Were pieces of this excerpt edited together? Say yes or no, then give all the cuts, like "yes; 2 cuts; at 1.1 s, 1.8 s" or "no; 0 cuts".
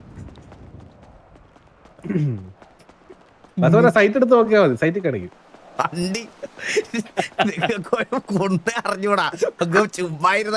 no; 0 cuts